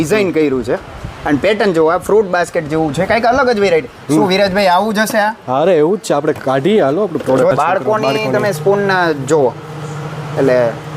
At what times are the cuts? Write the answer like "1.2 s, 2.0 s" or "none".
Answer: 7.5 s